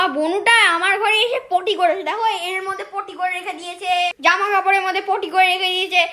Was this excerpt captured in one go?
no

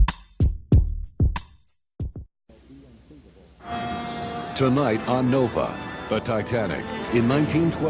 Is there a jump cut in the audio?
yes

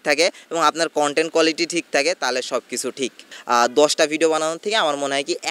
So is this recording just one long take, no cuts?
no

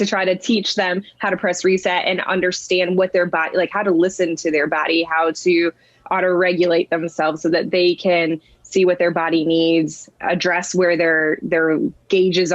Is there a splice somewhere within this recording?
no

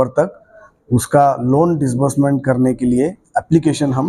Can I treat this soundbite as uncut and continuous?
yes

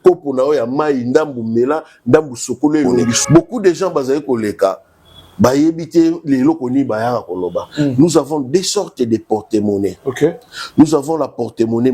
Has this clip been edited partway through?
yes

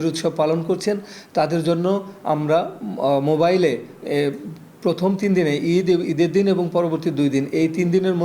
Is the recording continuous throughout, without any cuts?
yes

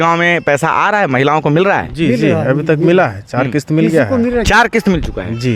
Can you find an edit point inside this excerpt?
no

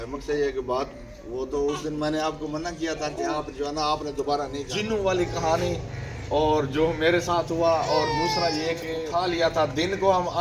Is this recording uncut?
no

